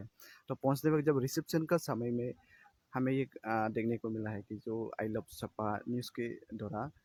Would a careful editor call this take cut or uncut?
uncut